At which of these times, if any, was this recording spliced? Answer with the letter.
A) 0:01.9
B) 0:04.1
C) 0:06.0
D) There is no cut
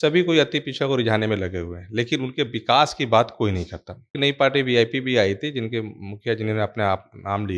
B